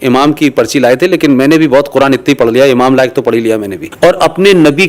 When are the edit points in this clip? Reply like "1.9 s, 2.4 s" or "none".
3.8 s